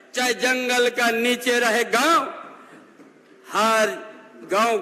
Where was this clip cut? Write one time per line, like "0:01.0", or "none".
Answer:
none